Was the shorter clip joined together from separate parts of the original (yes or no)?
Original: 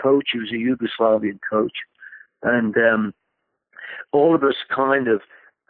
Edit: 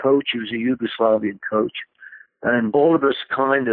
yes